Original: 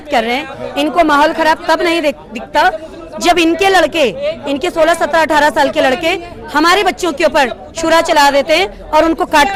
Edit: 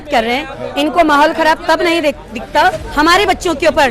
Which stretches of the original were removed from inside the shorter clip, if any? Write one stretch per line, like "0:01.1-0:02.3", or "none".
0:02.8-0:06.4